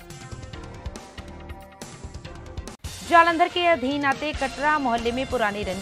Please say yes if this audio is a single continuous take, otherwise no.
no